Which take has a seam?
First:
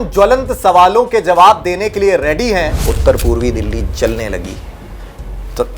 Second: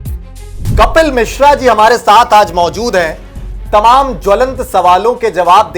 first; 1 cut; at 2.8 s

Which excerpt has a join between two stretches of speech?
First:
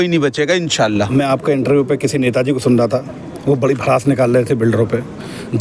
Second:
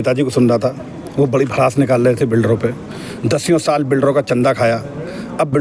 first; 1 cut; at 1.1 s

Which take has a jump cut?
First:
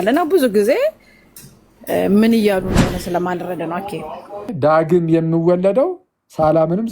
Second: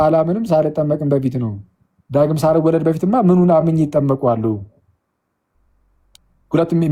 first; 1 cut; at 4.5 s

